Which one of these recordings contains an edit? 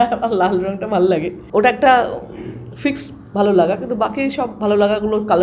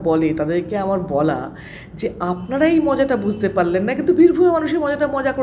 first; 1 cut; at 1.4 s

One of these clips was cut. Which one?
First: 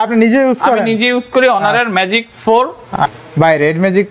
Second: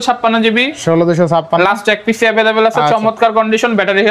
first; 1 cut; at 2.8 s

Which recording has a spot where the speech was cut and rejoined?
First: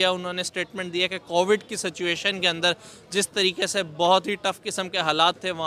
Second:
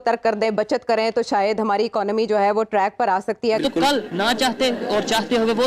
second; 1 cut; at 3.6 s

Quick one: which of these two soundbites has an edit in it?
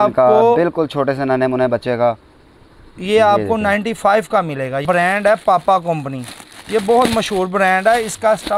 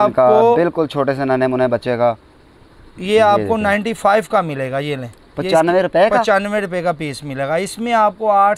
first; 1 cut; at 4.8 s

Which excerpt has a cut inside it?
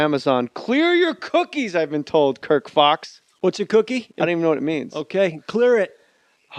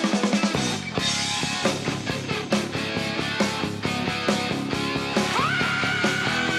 first; 1 cut; at 1.8 s

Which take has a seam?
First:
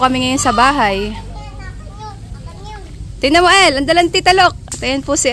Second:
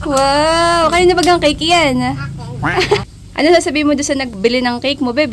second; 2 cuts; at 3.0 s, 4.3 s

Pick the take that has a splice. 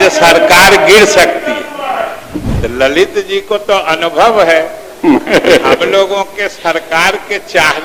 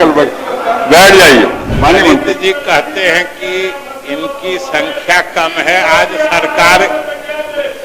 second; 1 cut; at 1.7 s

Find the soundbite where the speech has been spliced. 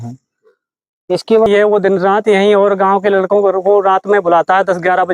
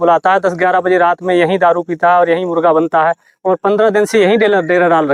first; 1 cut; at 1.5 s

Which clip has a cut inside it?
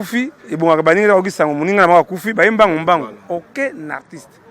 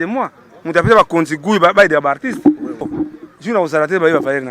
second; 1 cut; at 2.9 s

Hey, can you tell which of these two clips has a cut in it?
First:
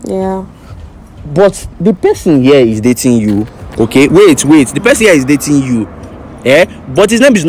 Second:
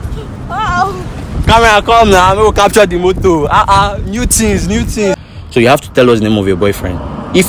second; 1 cut; at 5.2 s

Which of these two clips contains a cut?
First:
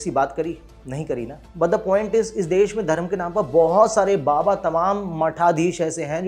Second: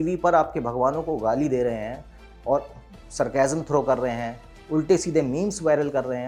first; 1 cut; at 1.4 s

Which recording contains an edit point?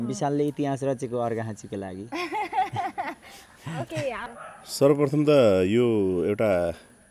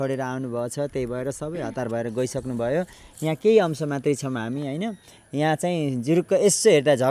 first; 1 cut; at 4.2 s

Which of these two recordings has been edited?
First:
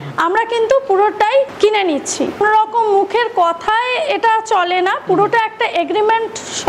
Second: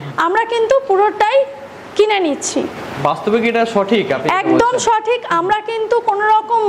first; 2 cuts; at 1.5 s, 2.4 s

